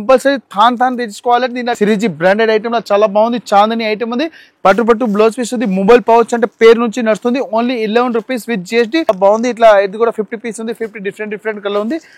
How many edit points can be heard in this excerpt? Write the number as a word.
three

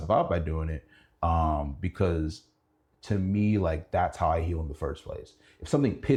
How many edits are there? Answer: zero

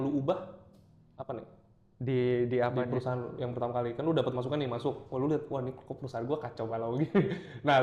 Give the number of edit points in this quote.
zero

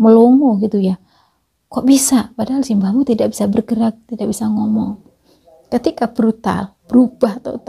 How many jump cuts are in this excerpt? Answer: zero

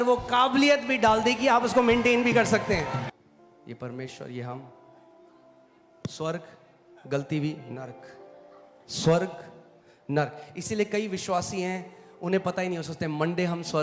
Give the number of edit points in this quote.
one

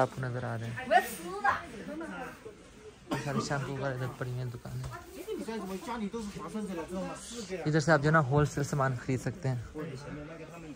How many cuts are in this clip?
zero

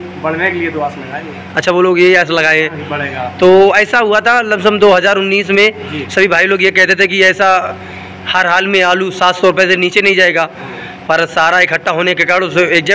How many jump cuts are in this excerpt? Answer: zero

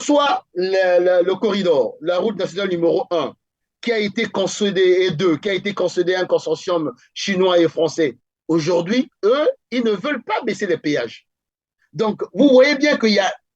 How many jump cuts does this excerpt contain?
one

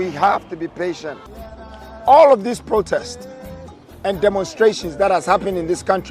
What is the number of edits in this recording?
one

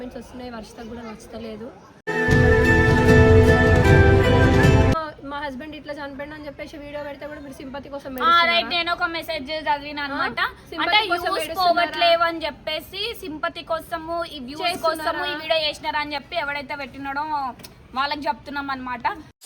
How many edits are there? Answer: one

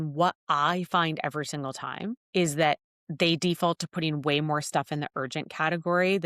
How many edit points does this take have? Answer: one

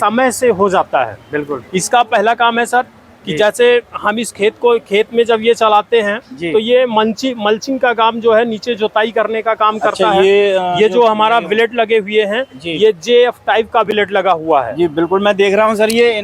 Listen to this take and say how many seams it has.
zero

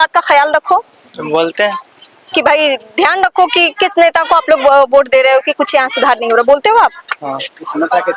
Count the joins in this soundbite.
zero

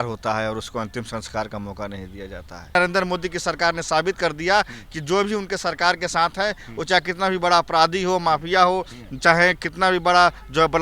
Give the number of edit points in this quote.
one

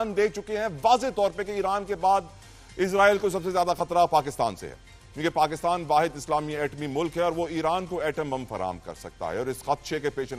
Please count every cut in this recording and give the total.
zero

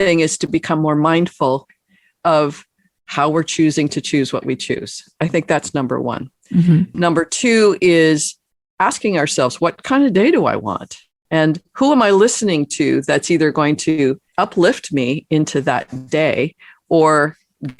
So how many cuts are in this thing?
zero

